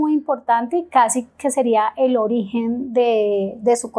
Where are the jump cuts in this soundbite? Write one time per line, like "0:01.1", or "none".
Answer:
none

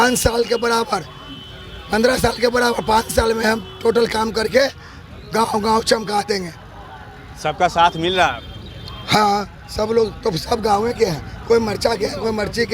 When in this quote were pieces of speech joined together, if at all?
none

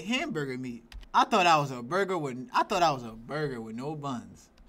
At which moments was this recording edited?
0:00.9

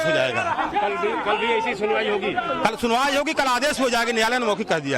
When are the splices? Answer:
0:03.9

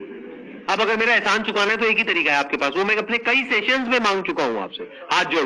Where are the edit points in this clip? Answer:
none

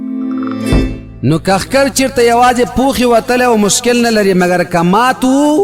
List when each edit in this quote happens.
0:01.0

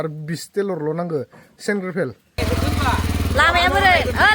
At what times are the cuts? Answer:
0:02.4

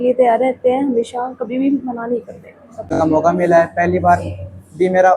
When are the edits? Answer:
0:03.0

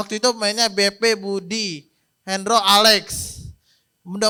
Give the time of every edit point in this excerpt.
none

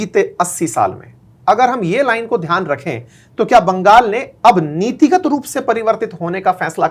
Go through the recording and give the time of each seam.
none

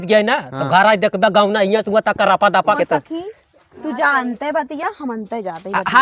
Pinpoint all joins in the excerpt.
0:02.8

